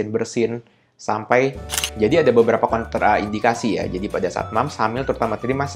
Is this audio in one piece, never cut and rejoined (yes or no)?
no